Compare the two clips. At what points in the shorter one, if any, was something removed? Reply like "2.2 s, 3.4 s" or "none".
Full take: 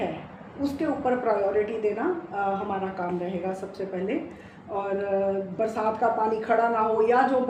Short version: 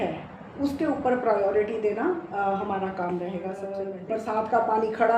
3.9 s

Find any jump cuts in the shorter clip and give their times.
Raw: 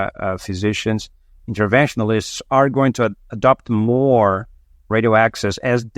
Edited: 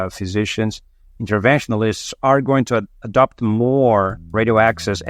4.2 s

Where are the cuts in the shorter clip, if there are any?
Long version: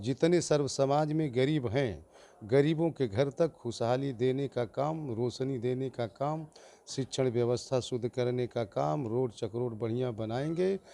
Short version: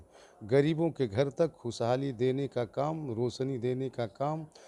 none

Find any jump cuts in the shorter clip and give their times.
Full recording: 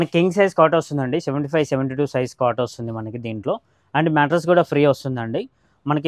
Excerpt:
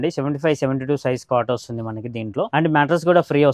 2.5 s

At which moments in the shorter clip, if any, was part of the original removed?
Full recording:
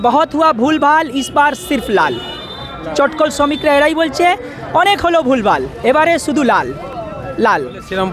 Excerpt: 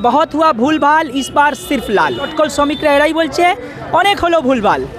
2.3 s

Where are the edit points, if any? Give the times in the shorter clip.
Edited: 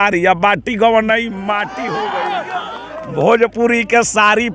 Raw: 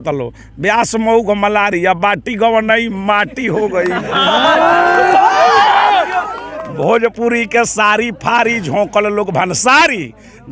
1.8 s

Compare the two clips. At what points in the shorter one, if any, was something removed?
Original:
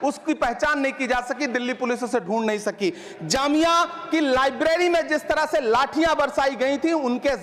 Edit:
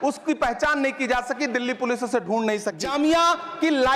2.7 s

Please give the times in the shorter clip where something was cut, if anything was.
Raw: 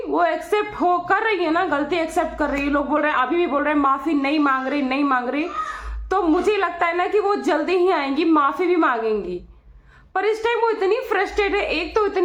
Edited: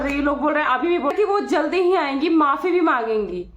1.1 s

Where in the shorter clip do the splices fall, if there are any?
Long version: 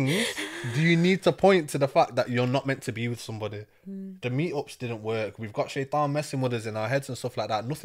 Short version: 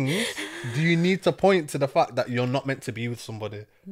none

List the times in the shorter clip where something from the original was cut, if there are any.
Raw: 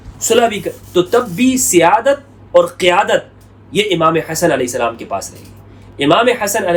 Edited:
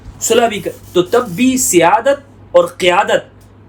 none

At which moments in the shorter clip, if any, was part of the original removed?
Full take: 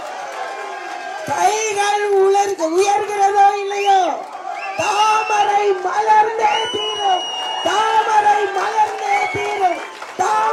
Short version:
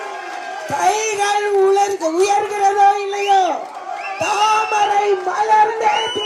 none

